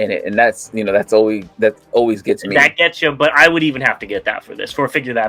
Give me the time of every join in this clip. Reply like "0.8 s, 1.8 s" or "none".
none